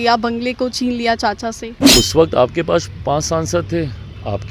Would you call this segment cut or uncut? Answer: cut